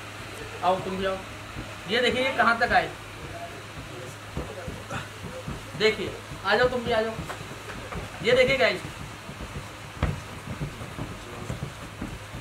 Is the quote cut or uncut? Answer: uncut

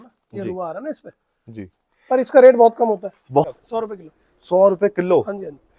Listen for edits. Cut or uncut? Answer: cut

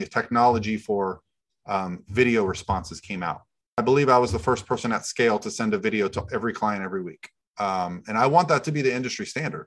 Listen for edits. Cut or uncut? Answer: cut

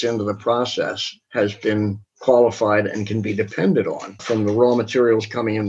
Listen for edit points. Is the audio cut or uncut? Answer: cut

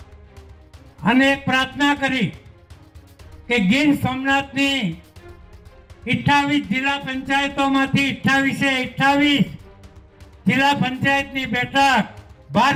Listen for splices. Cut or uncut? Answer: uncut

